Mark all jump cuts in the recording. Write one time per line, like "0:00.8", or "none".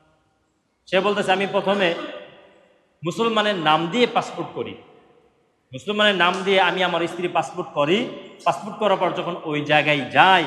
none